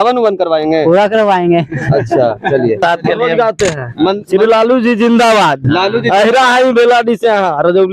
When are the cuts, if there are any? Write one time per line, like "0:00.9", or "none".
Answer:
0:02.8